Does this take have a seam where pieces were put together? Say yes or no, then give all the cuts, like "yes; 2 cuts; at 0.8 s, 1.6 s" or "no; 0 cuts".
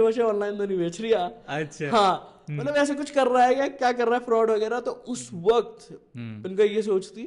no; 0 cuts